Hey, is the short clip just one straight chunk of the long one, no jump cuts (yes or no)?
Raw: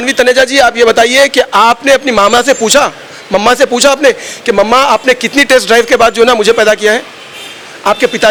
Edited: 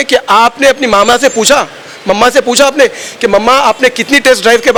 yes